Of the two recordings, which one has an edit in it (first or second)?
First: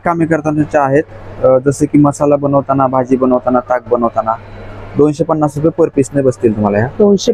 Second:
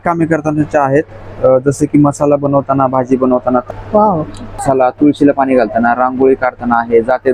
second